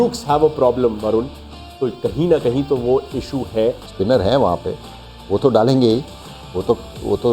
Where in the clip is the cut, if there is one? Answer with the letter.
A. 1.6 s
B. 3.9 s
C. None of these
B